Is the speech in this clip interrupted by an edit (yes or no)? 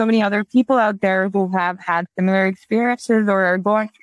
no